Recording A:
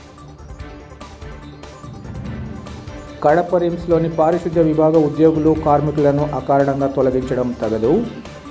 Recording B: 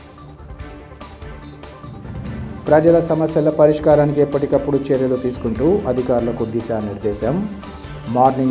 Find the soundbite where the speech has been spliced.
B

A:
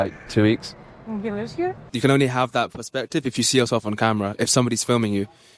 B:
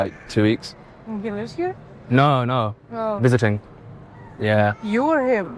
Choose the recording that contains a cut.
A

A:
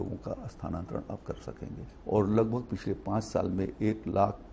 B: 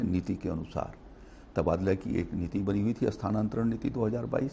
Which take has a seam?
A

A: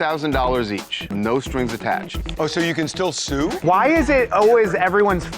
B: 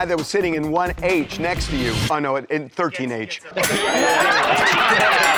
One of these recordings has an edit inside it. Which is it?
A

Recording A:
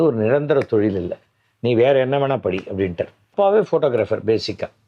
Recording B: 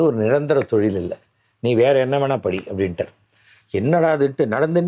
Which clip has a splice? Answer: A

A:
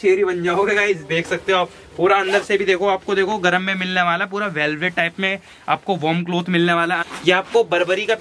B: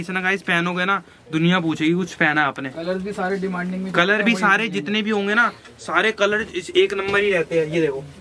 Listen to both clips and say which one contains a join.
A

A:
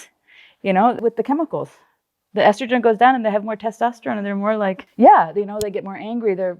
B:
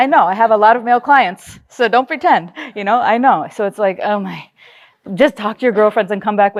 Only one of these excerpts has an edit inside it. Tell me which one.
A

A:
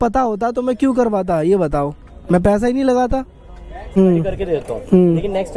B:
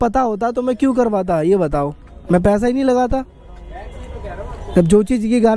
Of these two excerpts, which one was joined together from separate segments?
A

